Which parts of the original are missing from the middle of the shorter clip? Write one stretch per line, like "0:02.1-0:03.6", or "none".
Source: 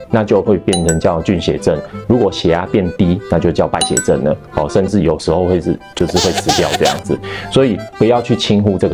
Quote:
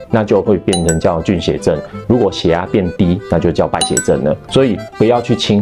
0:04.4-0:07.4